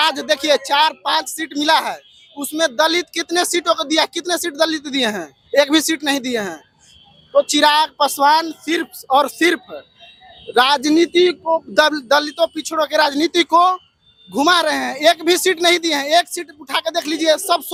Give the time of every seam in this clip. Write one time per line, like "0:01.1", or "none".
none